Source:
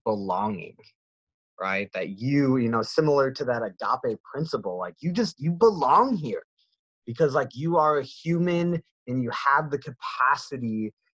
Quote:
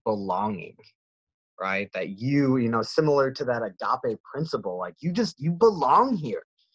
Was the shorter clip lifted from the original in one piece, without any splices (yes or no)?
yes